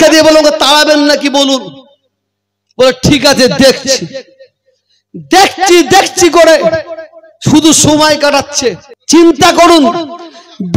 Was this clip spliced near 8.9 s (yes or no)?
yes